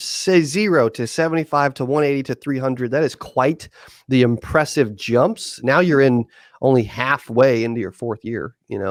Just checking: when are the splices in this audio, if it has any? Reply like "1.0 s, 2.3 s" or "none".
none